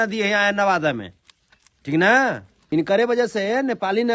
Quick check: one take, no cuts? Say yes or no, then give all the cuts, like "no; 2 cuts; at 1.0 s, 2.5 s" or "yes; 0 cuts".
no; 1 cut; at 2.5 s